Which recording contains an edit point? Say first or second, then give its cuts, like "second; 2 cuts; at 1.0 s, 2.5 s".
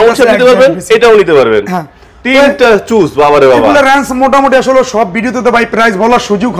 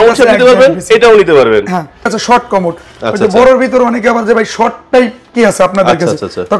second; 1 cut; at 2.2 s